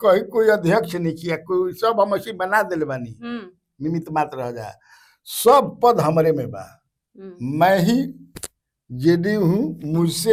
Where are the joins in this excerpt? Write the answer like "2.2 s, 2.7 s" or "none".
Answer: none